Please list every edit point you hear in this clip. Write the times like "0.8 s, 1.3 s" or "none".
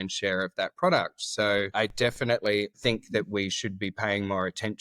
1.7 s, 2.8 s